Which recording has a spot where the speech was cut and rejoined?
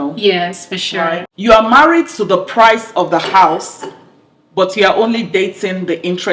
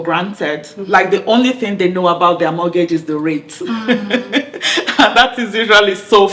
first; 1 cut; at 1.3 s

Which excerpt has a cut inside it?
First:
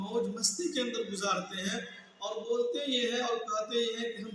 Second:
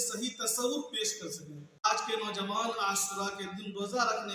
second; 1 cut; at 1.8 s

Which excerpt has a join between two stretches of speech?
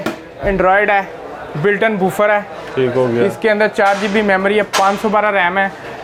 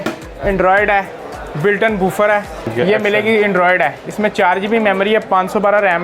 second; 1 cut; at 2.7 s

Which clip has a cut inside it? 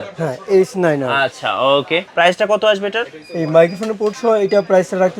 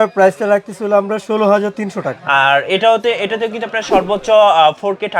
first; 1 cut; at 2.1 s

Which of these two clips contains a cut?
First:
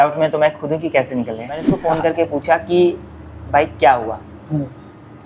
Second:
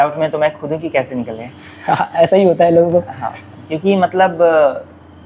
first; 1 cut; at 1.7 s

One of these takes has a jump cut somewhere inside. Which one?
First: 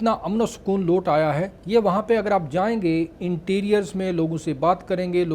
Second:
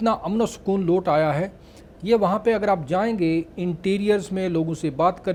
first; 1 cut; at 1.5 s

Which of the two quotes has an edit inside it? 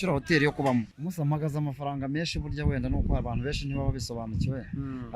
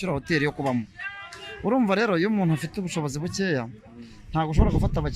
first; 1 cut; at 1.0 s

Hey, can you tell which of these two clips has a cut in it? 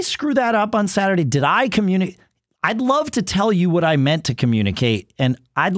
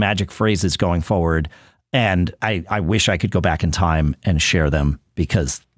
second; 1 cut; at 2.4 s

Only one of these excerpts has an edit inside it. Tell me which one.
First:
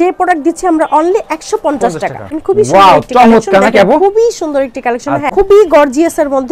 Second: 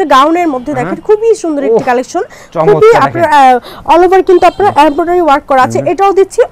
first; 2 cuts; at 2.3 s, 5.3 s

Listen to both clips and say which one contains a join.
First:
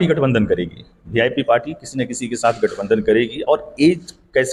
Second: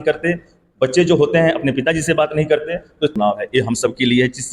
second; 1 cut; at 3.1 s

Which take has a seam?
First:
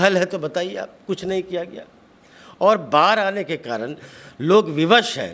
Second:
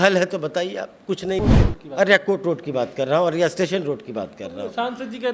second; 1 cut; at 1.4 s

